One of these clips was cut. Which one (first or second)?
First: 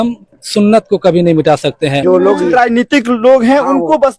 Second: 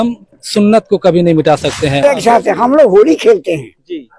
second